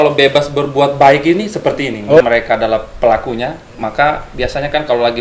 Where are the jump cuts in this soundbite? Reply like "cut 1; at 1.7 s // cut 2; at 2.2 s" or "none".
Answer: cut 1; at 2.2 s